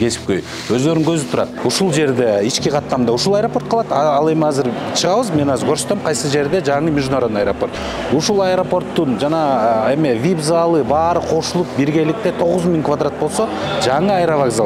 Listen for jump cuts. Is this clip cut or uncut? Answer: cut